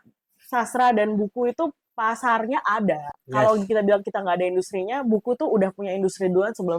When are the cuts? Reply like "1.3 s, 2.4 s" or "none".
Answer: none